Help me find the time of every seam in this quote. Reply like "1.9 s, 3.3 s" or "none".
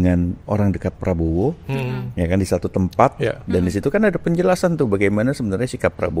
none